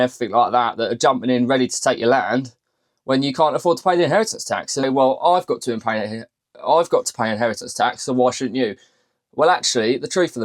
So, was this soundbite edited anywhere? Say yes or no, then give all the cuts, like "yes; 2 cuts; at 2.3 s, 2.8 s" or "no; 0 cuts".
yes; 1 cut; at 4.8 s